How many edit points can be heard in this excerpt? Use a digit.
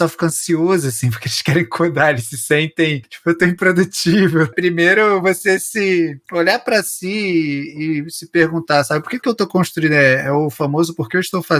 2